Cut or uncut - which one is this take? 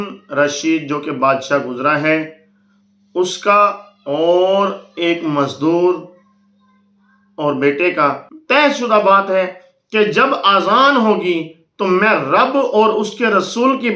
cut